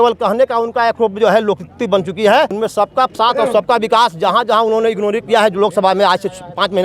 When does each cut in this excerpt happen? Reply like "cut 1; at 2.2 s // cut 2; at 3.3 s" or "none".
cut 1; at 2.5 s

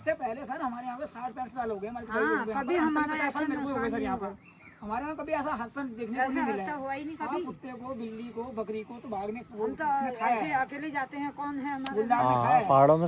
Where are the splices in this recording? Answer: none

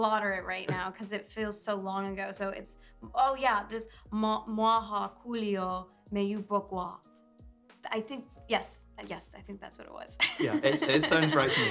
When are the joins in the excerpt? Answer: none

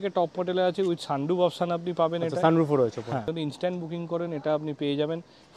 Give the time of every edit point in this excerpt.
cut 1; at 3.3 s

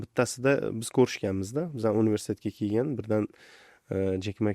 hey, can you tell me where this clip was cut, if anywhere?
none

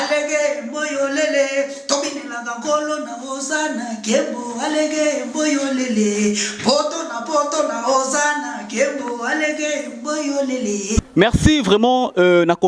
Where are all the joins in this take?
cut 1; at 11.0 s

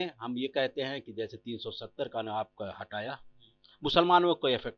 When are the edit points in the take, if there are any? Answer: none

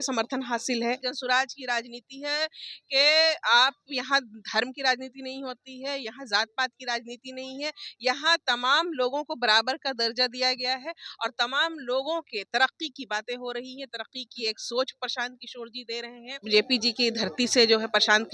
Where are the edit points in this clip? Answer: cut 1; at 1.1 s // cut 2; at 16.4 s

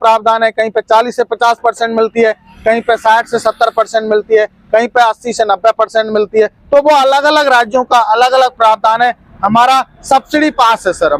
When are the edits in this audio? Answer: none

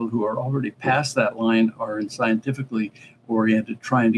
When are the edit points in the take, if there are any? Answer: none

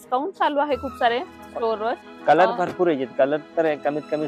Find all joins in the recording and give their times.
cut 1; at 2.1 s

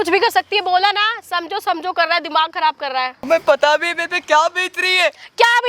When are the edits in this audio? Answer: cut 1; at 3.2 s

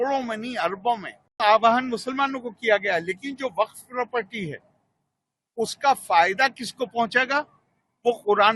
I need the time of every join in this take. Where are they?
cut 1; at 1.4 s

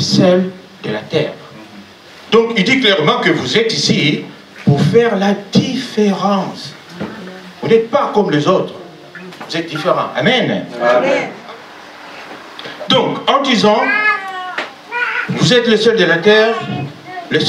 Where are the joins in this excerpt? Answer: cut 1; at 11.3 s

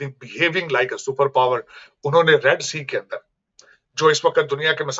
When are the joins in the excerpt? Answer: none

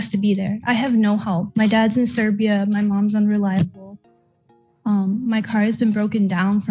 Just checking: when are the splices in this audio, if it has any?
none

